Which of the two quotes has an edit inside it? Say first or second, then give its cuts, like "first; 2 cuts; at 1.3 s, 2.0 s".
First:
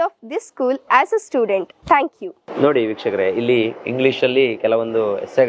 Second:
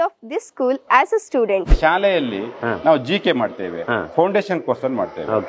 second; 1 cut; at 1.8 s